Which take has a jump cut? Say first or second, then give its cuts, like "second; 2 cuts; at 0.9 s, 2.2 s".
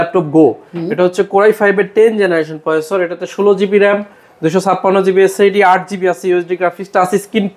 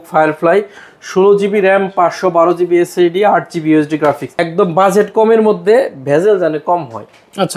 second; 1 cut; at 4.3 s